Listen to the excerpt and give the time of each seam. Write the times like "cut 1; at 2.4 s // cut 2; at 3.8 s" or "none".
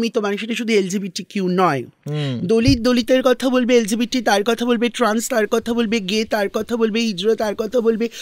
none